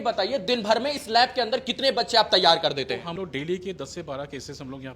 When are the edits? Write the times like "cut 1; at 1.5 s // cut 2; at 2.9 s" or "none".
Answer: cut 1; at 3.2 s